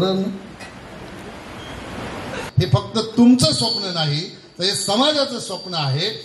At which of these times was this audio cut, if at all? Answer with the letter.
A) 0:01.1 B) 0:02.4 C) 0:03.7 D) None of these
B